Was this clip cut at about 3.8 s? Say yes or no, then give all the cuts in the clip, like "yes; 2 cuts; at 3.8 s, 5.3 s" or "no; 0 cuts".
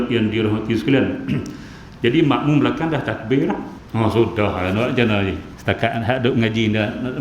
yes; 2 cuts; at 3.8 s, 5.5 s